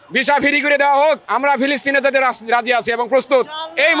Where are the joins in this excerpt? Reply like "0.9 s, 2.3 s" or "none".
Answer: 1.3 s